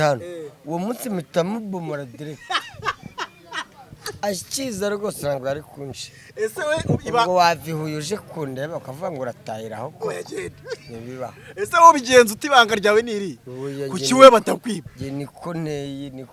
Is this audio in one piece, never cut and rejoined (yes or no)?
yes